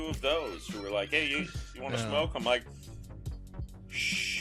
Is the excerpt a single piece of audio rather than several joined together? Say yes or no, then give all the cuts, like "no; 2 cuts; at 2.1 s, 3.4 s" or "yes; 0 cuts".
yes; 0 cuts